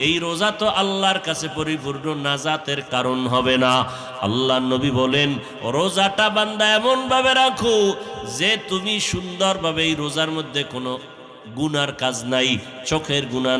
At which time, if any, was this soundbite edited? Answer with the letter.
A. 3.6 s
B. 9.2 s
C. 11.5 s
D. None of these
D